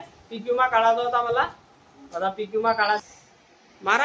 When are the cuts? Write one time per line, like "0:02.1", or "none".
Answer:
0:03.0